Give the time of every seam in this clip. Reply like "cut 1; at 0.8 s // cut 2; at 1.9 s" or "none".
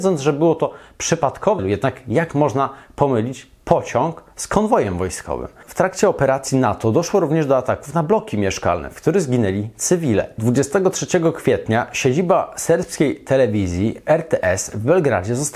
cut 1; at 10.3 s